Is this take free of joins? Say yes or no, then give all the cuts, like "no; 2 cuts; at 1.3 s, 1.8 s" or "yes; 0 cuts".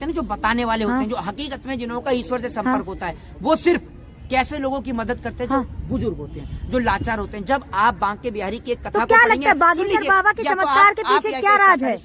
yes; 0 cuts